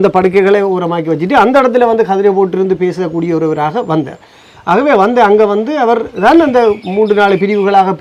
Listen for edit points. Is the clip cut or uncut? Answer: uncut